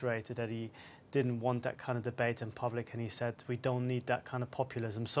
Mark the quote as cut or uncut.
cut